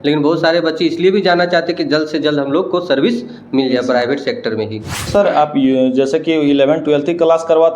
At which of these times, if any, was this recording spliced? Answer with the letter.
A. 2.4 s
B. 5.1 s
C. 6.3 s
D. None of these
B